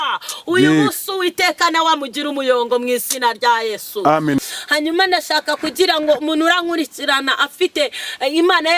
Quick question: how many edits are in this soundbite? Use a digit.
1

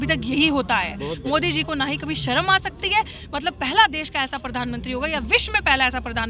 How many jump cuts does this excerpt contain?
0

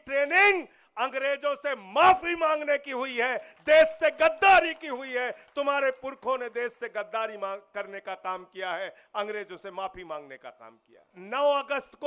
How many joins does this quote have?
1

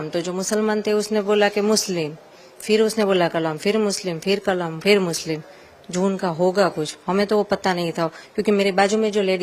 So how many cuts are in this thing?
0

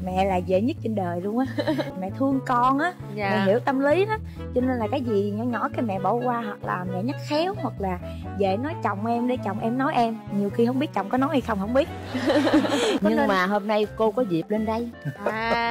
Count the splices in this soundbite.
2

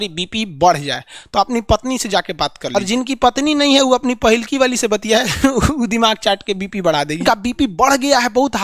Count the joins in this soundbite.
2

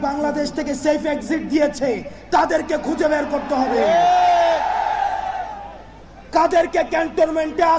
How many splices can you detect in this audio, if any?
0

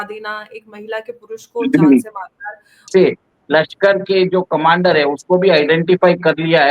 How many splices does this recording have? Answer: 1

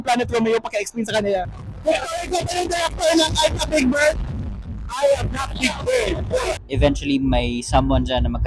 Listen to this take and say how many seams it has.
2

